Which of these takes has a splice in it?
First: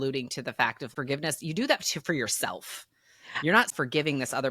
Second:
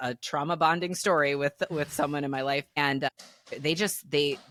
first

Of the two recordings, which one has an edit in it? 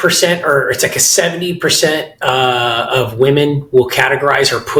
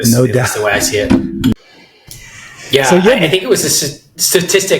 second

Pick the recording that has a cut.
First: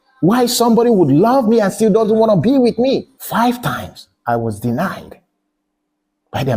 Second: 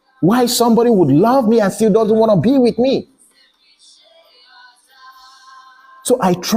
first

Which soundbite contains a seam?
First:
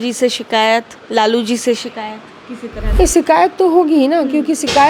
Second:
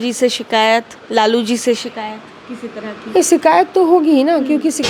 first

